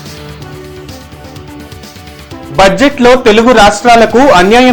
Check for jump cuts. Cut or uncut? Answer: cut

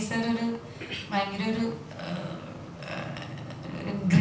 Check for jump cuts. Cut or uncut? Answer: uncut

